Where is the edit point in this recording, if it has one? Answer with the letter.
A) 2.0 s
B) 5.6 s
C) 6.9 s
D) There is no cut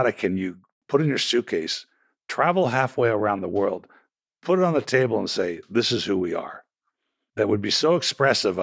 C